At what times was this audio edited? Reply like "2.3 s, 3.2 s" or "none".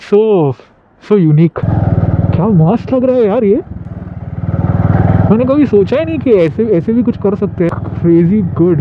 1.6 s, 7.7 s

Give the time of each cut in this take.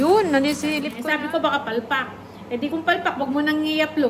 0.9 s

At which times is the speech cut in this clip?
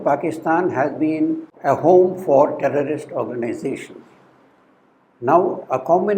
1.5 s

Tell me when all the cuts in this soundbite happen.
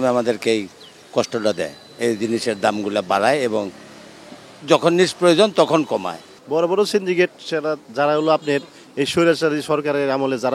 none

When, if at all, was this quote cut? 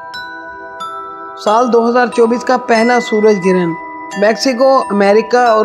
1.4 s

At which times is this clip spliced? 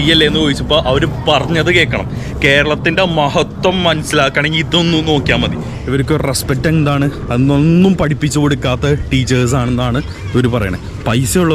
5.8 s

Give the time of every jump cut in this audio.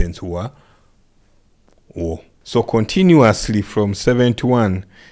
2.3 s

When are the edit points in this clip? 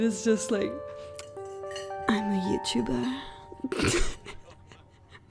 none

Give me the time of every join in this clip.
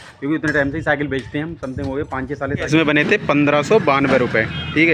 2.7 s

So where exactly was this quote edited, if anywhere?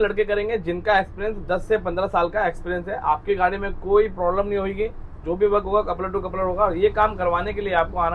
none

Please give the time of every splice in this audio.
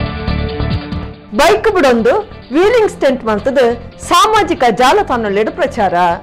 none

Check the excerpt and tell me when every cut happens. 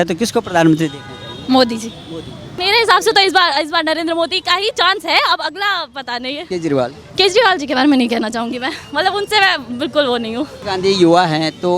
2.5 s, 6.5 s, 10.6 s

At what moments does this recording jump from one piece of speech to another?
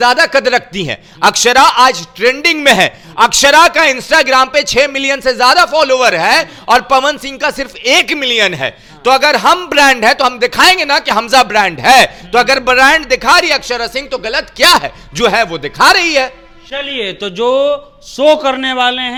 none

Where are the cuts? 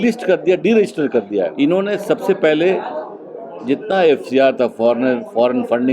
1.5 s

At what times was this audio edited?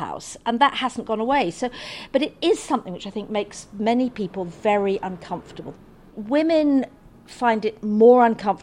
6.0 s

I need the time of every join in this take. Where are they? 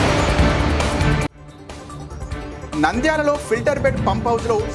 2.6 s

